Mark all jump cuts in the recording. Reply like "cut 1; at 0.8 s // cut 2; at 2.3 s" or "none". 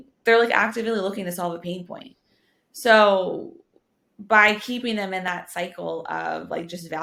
none